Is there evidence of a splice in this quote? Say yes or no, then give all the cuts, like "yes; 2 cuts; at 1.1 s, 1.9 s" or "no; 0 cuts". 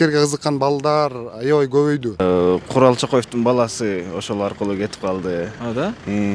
yes; 1 cut; at 2.2 s